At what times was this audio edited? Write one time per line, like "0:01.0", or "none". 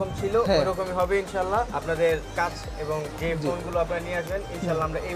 0:01.7
0:03.1

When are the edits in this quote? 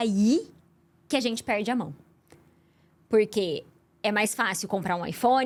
none

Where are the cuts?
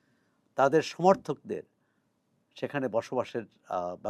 none

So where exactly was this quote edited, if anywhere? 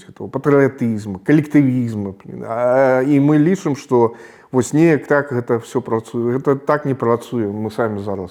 none

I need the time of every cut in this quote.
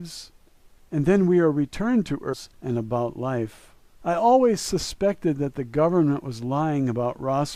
none

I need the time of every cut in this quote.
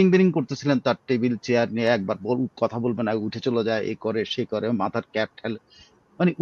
none

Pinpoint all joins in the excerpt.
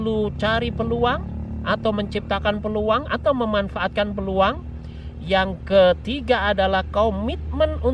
none

